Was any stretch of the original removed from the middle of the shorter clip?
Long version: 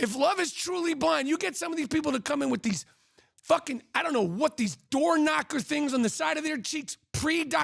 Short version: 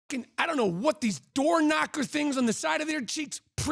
no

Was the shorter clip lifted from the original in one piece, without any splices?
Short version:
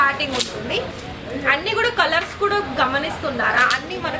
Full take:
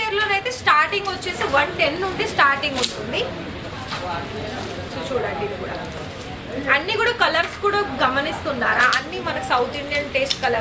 no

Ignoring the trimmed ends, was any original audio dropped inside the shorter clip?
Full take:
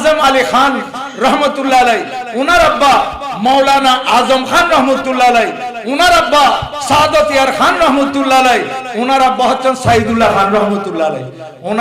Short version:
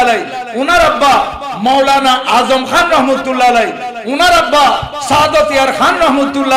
no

